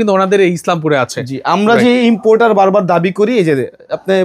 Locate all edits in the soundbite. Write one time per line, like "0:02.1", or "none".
none